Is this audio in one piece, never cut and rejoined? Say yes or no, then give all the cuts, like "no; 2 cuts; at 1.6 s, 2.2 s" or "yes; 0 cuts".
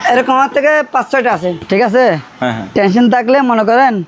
no; 1 cut; at 1.6 s